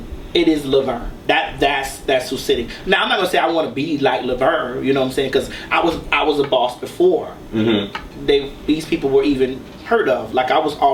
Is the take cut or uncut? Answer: uncut